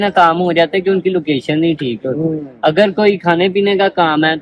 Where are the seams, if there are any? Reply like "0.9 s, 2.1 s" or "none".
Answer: none